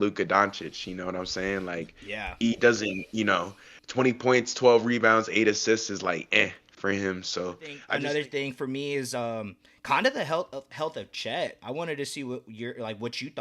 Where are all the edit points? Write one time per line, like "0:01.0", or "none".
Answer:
0:07.8